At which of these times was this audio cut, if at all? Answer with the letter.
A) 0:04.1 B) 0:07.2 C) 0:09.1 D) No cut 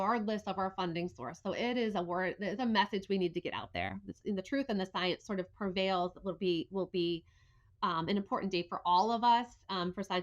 A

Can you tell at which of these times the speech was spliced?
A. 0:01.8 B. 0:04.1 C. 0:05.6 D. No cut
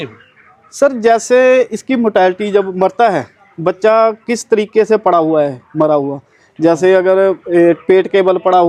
D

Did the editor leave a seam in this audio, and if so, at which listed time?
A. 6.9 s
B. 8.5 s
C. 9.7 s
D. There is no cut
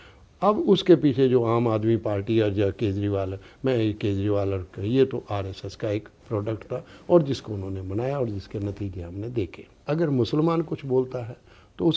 C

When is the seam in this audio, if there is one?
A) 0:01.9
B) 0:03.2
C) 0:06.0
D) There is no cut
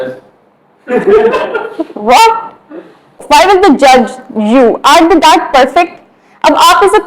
B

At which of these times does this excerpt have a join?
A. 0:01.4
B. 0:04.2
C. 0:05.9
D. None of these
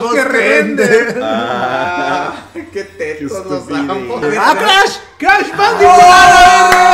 B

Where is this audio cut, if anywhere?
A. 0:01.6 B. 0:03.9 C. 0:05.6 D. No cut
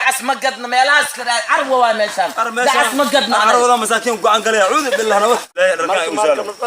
C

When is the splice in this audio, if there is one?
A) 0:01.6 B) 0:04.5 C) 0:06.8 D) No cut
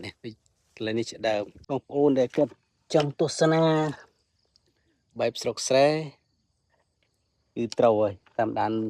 A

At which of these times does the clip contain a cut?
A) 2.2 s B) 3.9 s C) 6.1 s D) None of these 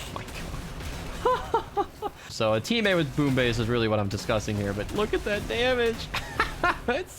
A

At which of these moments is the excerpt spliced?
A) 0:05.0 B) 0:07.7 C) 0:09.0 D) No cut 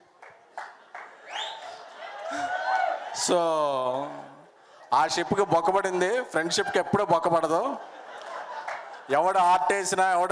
D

